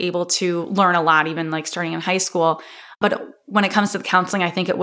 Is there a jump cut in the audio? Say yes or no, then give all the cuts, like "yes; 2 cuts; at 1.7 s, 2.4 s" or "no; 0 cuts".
yes; 1 cut; at 3.0 s